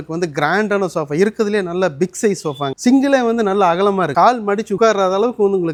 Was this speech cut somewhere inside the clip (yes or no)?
no